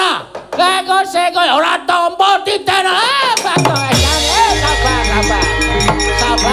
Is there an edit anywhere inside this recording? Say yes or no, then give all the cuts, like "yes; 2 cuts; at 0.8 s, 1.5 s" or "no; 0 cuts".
no; 0 cuts